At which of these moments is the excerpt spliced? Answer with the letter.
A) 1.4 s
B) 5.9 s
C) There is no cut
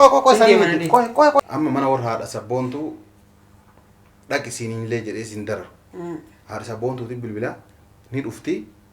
A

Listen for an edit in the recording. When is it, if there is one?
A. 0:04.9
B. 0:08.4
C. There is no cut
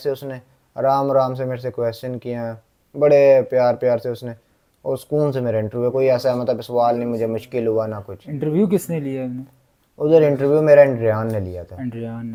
C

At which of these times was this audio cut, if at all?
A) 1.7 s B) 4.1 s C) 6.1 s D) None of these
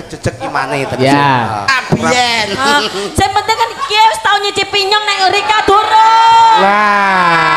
A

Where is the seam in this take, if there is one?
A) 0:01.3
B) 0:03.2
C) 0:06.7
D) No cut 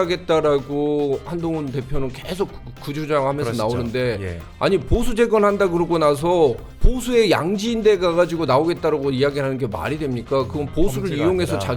C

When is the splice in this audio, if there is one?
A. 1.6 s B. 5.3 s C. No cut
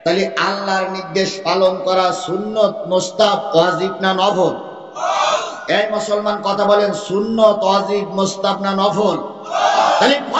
A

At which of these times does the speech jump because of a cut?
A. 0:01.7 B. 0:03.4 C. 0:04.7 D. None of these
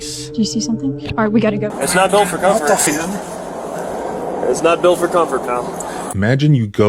A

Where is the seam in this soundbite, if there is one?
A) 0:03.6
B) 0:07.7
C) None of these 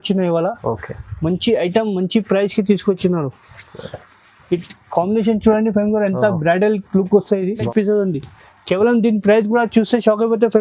B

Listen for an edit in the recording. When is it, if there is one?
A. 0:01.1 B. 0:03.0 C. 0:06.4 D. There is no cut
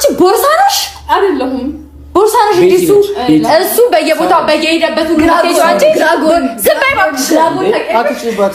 D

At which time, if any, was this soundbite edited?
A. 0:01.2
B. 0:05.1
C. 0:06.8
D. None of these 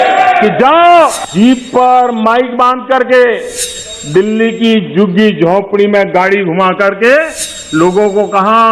A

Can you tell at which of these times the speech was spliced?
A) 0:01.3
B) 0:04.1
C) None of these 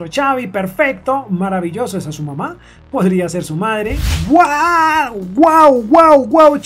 B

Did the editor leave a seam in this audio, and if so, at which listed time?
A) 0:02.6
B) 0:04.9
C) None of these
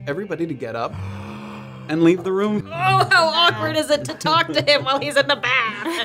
A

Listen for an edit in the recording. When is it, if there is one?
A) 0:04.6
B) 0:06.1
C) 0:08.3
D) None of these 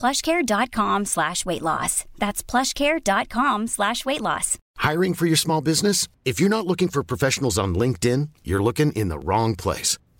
A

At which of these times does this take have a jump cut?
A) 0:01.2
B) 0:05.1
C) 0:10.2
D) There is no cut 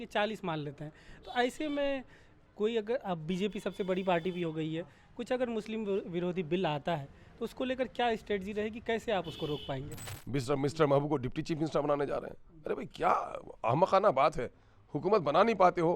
C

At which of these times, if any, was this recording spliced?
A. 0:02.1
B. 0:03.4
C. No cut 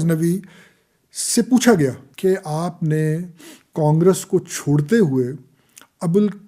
A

